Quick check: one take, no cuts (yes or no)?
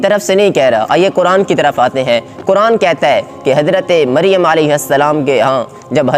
yes